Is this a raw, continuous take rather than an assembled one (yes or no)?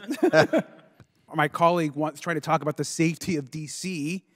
no